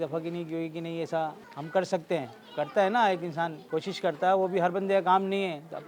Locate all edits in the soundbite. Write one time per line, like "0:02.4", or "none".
none

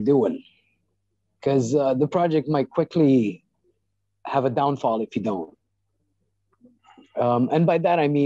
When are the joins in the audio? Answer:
none

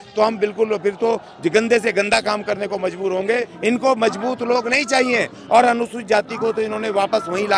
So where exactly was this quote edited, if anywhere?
0:03.5

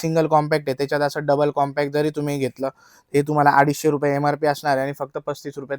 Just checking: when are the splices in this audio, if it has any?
none

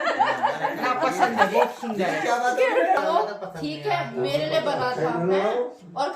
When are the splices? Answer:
0:03.0

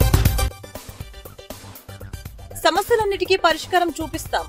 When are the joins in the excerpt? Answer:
0:02.5

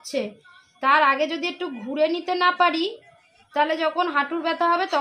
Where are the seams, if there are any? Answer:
none

